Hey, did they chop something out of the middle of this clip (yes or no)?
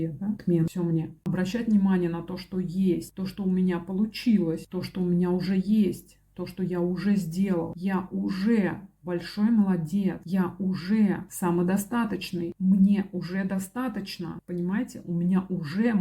yes